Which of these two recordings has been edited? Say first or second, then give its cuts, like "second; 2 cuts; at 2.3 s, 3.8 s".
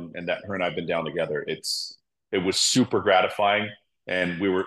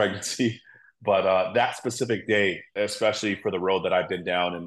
second; 1 cut; at 2.7 s